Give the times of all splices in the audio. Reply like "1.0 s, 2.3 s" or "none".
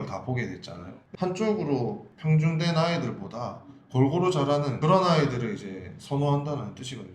2.1 s